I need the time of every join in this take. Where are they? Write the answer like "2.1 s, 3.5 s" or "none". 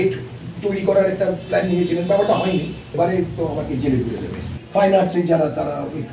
2.9 s, 4.5 s

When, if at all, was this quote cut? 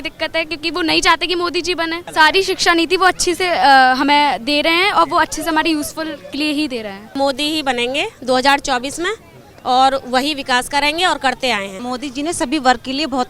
2.0 s, 7.1 s, 11.8 s

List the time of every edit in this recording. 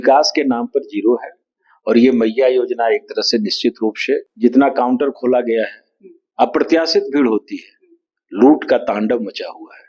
4.3 s

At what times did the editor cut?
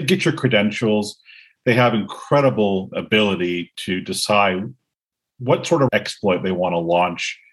5.9 s

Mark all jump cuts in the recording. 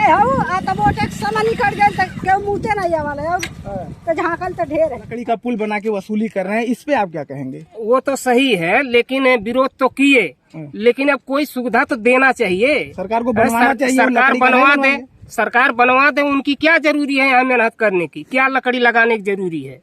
5.2 s

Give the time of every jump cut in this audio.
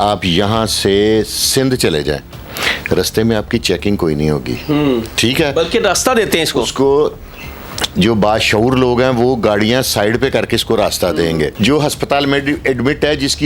11.5 s

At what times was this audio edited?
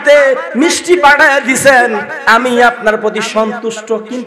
none

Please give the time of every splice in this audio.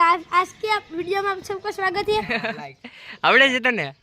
2.3 s

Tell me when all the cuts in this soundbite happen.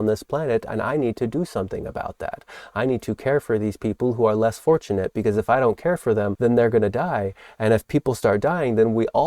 6.3 s

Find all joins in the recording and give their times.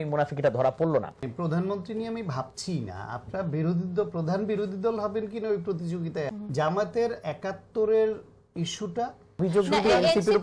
1.2 s, 6.3 s, 9.4 s

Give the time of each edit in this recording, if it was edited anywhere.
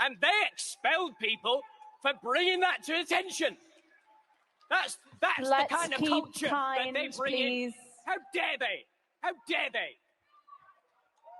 none

